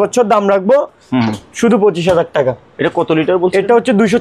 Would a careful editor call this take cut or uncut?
uncut